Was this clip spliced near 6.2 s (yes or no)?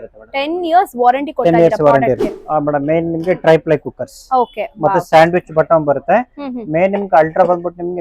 no